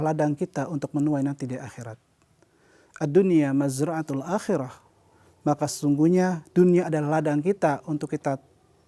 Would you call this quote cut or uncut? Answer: uncut